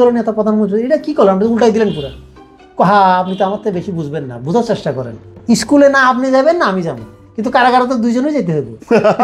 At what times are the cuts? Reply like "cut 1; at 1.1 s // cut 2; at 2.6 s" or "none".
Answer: cut 1; at 5.2 s